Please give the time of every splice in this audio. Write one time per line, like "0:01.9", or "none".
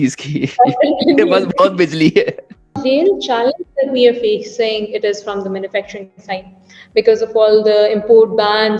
0:02.8